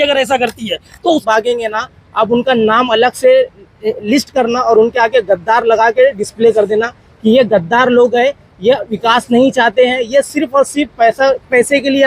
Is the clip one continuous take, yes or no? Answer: no